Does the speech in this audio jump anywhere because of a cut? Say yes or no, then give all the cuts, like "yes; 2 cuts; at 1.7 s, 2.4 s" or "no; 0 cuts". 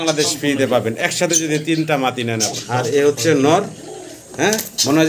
yes; 1 cut; at 2.5 s